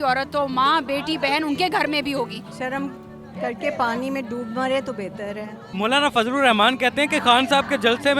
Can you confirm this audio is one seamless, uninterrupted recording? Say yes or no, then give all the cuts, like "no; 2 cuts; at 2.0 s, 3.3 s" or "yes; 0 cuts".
no; 2 cuts; at 2.5 s, 5.6 s